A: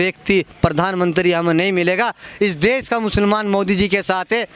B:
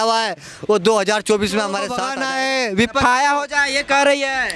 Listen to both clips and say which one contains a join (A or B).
B